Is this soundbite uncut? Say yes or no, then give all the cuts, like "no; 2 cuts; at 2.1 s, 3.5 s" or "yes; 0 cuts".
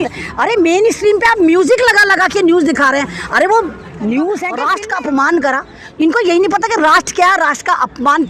no; 1 cut; at 4.6 s